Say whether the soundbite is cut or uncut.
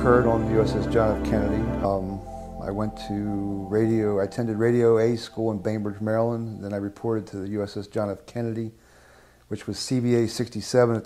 uncut